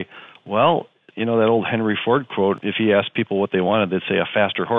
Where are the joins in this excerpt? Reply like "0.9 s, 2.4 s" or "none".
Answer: 1.0 s, 2.6 s